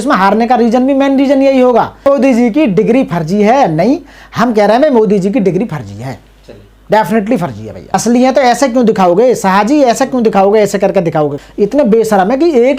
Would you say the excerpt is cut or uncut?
cut